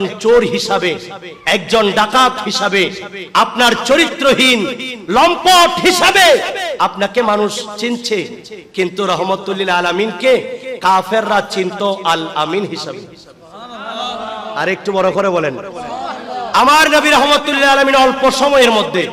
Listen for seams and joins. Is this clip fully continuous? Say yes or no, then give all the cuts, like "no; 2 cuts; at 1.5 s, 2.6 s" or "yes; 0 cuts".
yes; 0 cuts